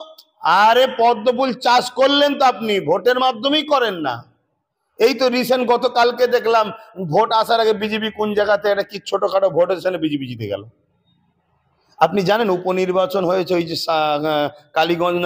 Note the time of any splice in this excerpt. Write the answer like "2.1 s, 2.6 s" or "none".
none